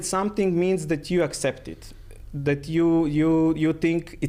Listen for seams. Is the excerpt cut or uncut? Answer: uncut